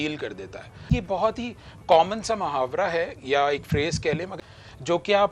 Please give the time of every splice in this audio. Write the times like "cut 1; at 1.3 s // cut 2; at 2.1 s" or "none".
cut 1; at 0.9 s // cut 2; at 4.3 s

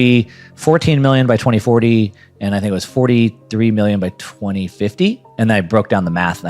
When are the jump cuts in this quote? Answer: cut 1; at 5.3 s

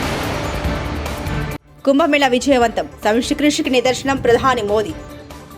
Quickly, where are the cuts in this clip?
cut 1; at 1.6 s

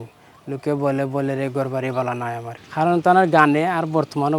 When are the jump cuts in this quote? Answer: none

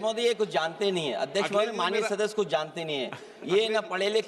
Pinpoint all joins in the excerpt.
none

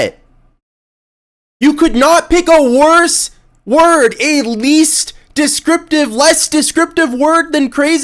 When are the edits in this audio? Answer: none

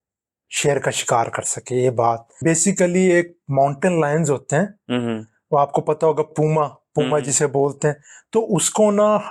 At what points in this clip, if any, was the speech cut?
cut 1; at 2.3 s

